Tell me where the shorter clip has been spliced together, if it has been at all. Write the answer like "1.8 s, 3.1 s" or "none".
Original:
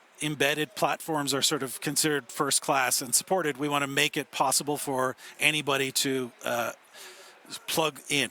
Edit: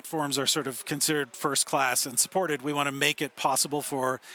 none